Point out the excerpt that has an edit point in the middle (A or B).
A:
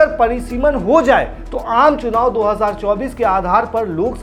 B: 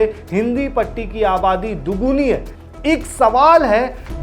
B